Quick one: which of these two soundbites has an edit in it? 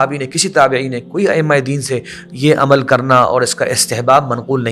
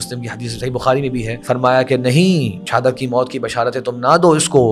second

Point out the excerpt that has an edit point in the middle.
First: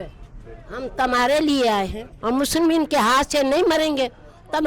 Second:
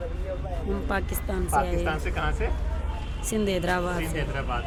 first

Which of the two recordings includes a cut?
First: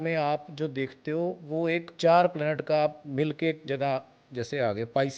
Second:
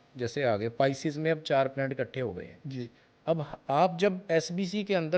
first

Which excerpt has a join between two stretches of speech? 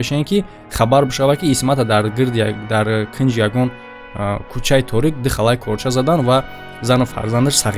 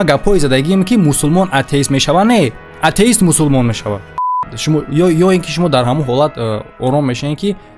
second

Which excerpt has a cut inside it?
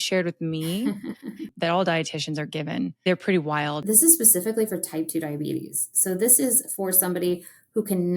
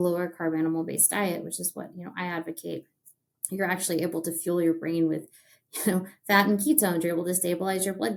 first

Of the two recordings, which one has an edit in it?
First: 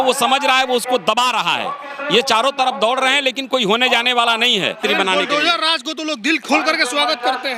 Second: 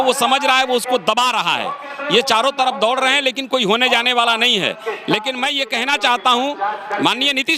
first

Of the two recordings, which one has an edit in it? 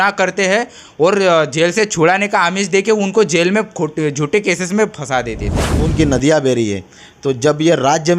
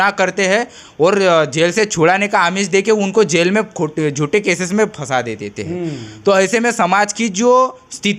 first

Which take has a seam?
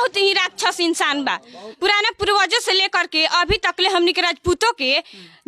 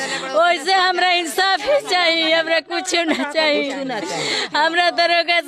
first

